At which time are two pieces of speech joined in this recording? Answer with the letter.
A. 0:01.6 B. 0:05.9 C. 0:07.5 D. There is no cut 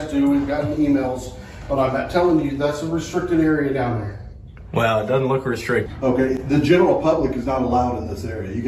B